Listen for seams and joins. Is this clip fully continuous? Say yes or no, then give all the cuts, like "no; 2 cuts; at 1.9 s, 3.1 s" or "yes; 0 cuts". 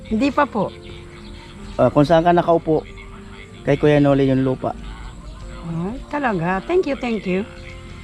yes; 0 cuts